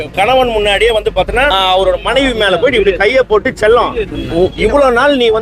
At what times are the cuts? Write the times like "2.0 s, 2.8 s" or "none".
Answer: 1.5 s